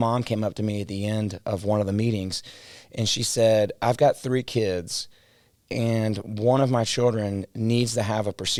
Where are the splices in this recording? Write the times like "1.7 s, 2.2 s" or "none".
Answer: none